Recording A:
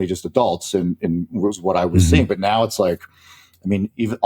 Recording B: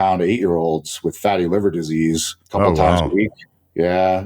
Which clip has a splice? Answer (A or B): B